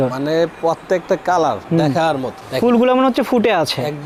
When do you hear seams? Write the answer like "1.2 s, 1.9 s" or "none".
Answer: none